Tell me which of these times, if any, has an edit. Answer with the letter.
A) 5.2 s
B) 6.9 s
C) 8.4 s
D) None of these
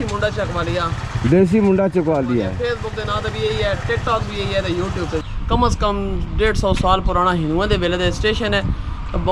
A